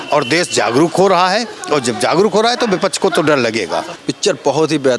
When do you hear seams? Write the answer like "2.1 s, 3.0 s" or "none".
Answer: 3.9 s